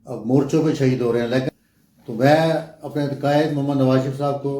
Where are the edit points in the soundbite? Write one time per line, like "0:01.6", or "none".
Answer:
0:01.5